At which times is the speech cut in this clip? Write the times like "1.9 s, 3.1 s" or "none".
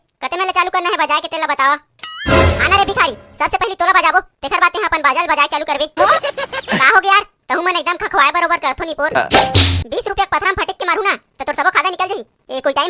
none